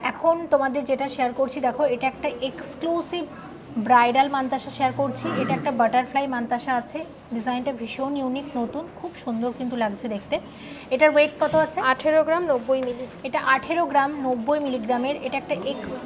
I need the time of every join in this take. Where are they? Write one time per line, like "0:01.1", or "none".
none